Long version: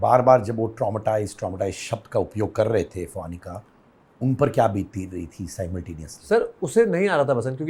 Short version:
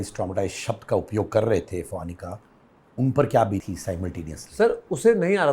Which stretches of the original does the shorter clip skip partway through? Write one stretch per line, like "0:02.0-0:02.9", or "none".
0:04.9-0:05.4